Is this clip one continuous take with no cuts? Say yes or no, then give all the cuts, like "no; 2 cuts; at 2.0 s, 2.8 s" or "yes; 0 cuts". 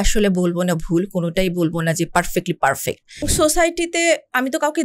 no; 1 cut; at 3.3 s